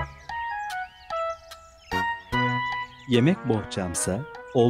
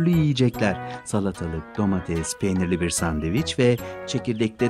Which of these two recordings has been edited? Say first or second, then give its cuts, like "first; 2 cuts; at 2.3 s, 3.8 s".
first; 1 cut; at 2.9 s